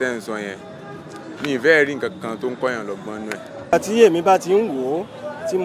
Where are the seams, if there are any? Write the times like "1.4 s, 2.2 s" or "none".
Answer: 3.7 s